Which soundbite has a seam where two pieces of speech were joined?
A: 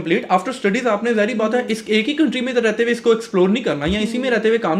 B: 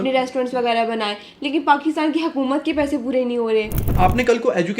B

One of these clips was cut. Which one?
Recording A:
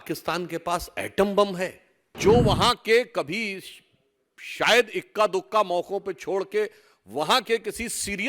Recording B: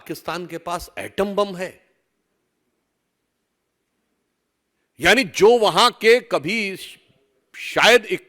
A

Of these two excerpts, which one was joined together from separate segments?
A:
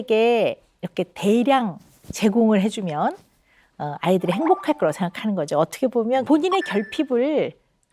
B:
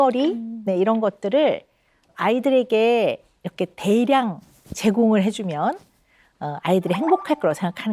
A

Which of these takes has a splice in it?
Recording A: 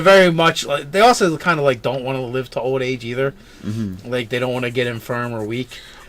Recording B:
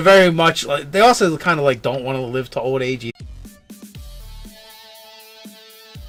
A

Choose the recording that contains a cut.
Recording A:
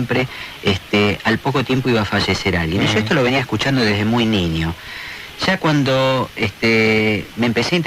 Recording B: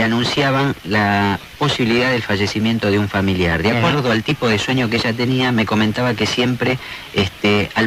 A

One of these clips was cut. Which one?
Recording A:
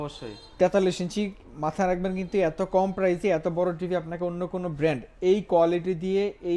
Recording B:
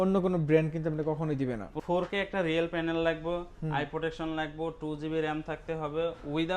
B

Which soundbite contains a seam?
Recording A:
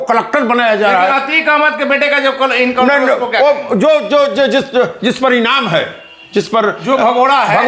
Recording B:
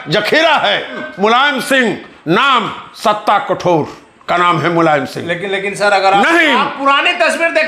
B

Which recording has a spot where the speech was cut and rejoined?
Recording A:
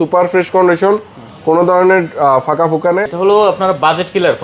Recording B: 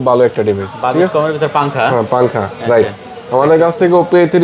A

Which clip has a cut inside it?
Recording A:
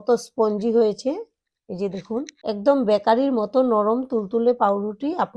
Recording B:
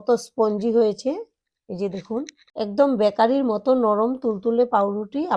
A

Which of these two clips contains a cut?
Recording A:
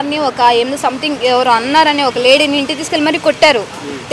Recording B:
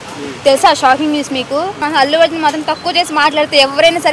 B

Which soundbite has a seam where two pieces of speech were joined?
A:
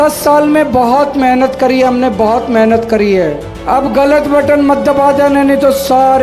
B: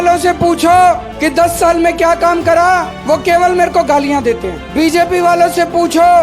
B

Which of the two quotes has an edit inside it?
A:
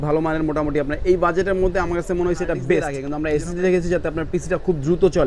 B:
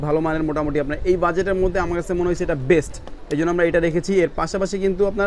A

